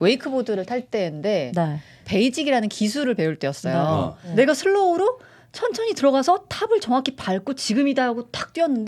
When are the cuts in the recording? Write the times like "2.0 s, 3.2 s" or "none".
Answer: 4.2 s

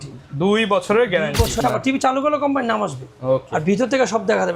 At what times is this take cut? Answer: 1.6 s

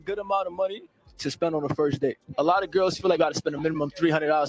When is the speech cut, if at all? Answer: 2.2 s

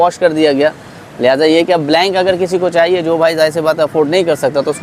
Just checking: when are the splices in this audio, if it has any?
none

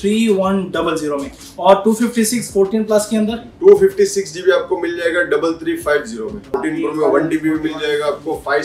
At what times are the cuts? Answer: 6.6 s

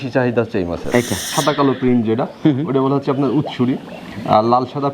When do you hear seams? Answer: 1.3 s

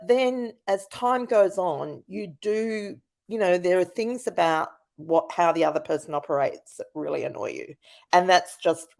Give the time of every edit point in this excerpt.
none

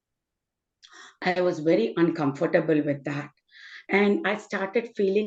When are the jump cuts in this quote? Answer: none

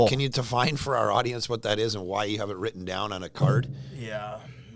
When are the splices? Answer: none

